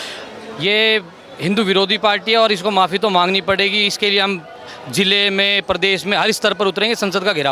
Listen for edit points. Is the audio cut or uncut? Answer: uncut